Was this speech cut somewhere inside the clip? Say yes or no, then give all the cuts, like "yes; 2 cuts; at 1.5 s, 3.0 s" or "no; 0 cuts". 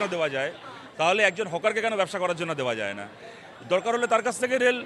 no; 0 cuts